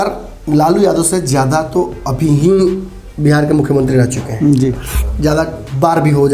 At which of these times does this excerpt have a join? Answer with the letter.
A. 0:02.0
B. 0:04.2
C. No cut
C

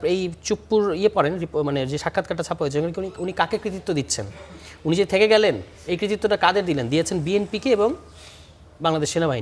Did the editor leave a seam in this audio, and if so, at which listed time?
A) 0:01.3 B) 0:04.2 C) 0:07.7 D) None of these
D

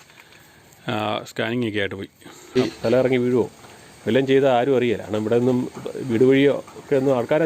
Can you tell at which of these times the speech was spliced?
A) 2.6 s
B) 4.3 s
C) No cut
A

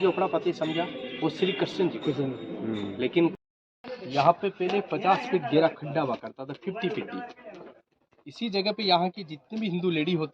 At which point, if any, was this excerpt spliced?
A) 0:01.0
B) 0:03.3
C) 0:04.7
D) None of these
B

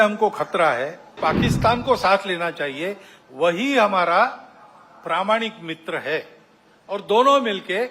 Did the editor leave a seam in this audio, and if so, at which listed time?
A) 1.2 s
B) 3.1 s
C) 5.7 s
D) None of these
A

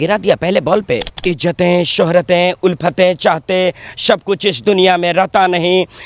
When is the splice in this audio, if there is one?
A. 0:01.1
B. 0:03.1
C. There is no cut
A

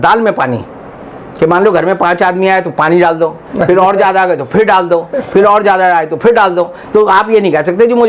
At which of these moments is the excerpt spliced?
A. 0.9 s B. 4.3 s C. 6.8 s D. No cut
D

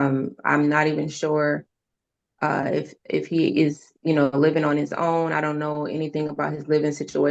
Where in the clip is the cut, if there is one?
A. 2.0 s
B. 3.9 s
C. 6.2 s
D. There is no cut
A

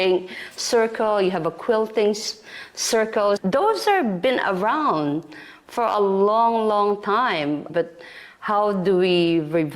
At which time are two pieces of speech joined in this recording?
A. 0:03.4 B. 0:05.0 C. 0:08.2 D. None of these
A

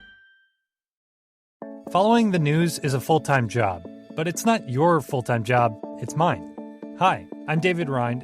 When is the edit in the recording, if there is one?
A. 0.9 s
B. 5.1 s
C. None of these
A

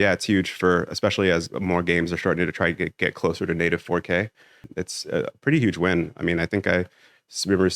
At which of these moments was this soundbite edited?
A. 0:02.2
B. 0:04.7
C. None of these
B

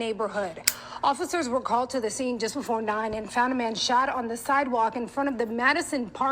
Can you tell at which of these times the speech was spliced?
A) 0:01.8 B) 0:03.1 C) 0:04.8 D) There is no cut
B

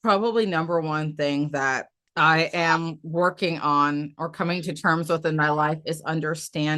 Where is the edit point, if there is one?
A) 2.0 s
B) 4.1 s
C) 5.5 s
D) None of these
A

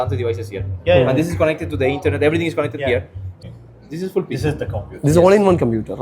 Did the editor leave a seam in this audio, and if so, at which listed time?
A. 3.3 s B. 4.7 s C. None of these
A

